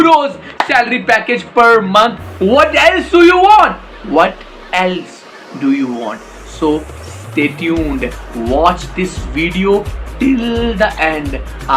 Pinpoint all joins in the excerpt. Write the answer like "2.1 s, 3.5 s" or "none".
none